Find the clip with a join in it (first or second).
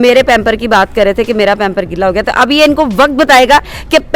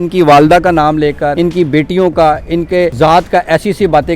second